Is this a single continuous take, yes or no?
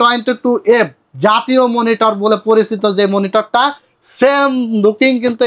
yes